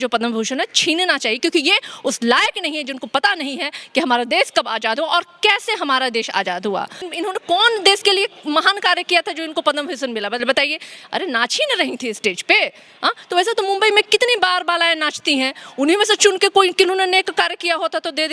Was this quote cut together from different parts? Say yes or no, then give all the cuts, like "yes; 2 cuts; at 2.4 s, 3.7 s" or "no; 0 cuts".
yes; 1 cut; at 7.1 s